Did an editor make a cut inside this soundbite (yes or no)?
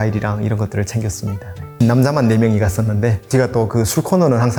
no